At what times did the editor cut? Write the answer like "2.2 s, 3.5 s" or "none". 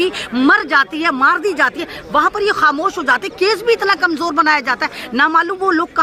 none